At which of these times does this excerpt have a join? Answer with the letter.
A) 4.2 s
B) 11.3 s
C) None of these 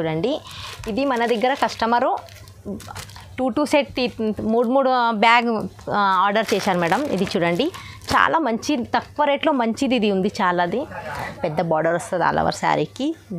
B